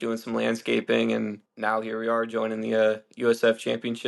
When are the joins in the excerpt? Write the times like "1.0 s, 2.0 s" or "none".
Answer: 1.5 s